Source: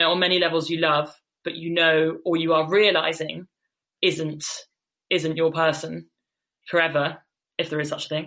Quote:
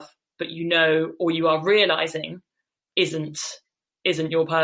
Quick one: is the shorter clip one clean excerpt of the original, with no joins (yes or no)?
yes